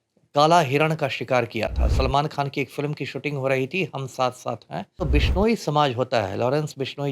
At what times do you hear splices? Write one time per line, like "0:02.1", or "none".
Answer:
0:05.1